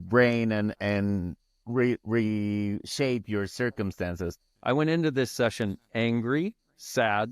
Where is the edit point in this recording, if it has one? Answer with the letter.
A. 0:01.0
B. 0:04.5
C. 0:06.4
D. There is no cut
B